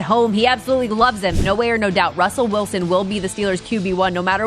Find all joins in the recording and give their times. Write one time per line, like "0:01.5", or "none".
0:01.4